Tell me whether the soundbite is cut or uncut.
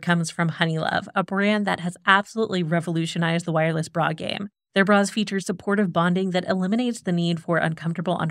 uncut